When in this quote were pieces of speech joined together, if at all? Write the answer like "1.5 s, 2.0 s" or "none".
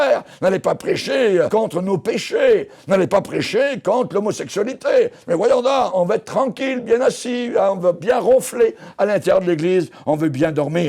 1.5 s, 5.9 s